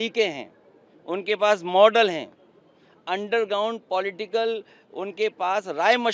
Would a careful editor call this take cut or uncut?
uncut